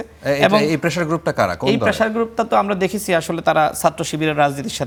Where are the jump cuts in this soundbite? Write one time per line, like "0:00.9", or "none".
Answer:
none